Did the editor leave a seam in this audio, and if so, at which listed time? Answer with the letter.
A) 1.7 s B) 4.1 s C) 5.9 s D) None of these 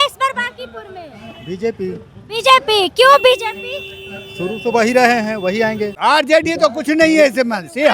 C